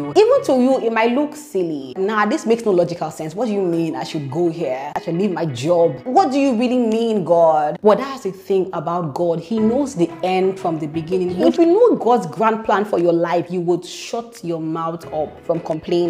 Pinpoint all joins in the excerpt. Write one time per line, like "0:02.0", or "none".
0:05.0
0:06.0
0:11.4

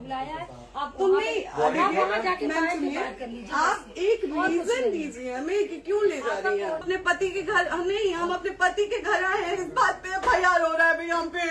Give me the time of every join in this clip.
0:06.8

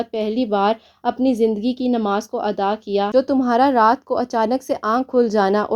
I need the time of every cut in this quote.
0:03.1

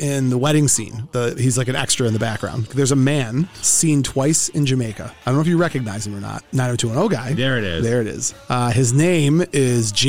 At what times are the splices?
0:01.0
0:02.6
0:03.6
0:06.3

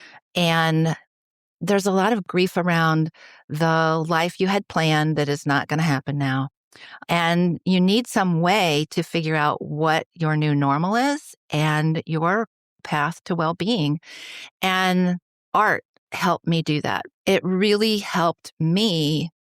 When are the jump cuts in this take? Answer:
0:02.2
0:07.1
0:12.8
0:15.3
0:17.0

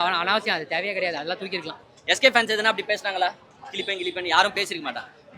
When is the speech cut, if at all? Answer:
0:01.8

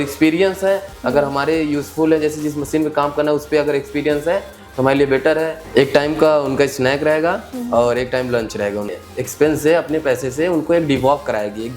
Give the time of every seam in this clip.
0:05.7
0:08.9

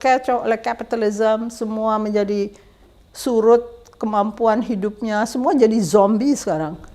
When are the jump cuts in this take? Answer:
none

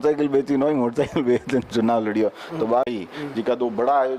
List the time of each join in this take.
0:02.9

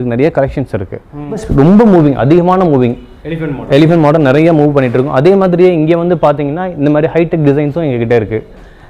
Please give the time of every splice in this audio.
0:01.5

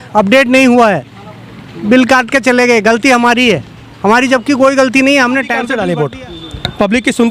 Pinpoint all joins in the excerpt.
0:05.6

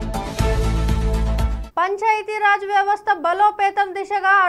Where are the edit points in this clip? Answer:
0:01.6

